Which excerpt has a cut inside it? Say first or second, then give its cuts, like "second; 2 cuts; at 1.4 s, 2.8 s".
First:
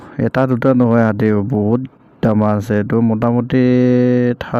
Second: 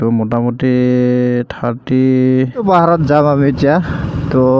second; 1 cut; at 2.6 s